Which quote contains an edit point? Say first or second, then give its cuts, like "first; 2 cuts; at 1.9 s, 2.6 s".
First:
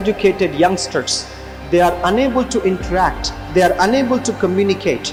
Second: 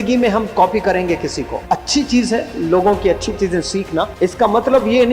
second; 2 cuts; at 1.5 s, 4.1 s